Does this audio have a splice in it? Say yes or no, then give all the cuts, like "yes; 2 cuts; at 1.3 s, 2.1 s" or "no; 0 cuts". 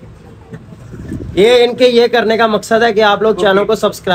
no; 0 cuts